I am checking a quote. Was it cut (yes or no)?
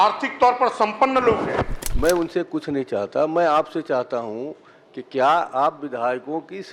yes